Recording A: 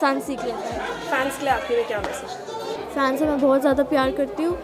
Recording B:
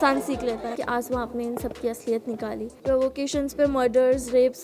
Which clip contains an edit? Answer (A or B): B